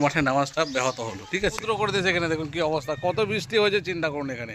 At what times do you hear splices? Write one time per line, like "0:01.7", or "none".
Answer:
0:01.6